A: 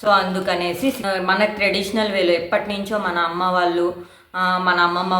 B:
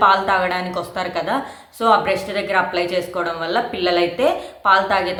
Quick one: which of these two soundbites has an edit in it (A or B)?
A